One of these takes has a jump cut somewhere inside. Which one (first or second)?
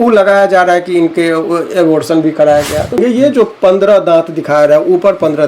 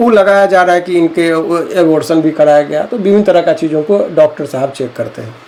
first